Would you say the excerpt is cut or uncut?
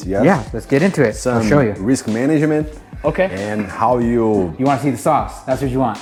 uncut